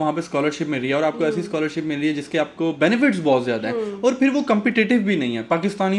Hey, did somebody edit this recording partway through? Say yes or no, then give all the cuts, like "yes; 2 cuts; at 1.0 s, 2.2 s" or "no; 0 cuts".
no; 0 cuts